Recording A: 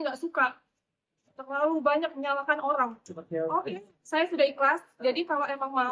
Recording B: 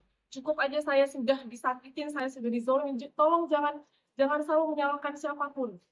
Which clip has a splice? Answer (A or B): A